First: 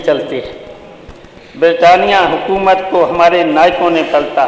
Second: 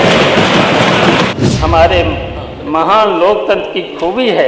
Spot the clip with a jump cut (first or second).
second